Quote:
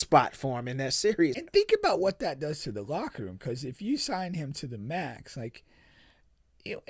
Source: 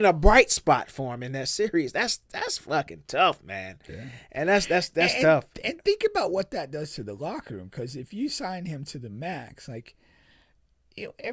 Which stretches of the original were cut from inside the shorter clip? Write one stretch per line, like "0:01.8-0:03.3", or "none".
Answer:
0:01.9-0:05.7